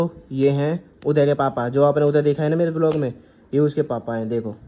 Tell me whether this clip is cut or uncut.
uncut